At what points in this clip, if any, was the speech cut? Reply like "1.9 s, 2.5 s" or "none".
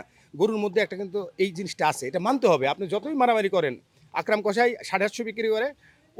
none

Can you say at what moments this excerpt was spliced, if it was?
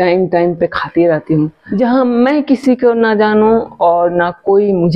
1.6 s

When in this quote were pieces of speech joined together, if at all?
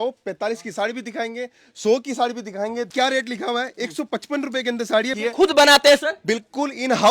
2.9 s, 5.1 s

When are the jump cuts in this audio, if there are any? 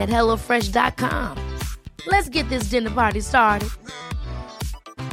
none

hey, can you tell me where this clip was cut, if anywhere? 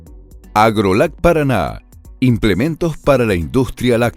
none

